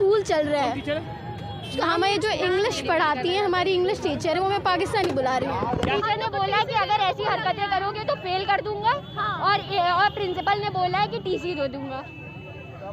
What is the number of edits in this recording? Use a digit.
1